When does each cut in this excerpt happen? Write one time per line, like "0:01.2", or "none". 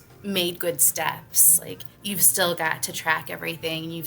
0:02.1